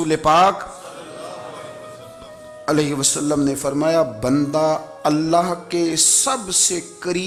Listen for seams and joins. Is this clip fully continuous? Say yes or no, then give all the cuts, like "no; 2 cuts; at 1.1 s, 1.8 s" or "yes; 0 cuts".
yes; 0 cuts